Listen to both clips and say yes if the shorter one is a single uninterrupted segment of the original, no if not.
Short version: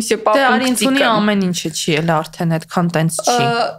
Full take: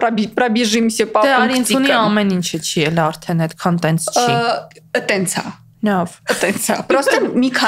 yes